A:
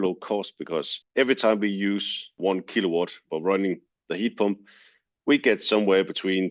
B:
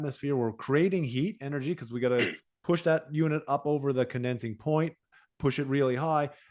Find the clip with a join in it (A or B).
A